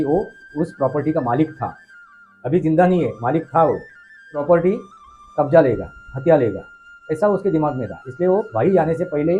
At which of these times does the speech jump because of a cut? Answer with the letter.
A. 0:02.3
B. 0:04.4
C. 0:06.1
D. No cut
B